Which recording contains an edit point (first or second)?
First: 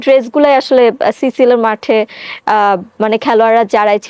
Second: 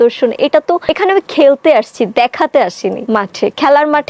second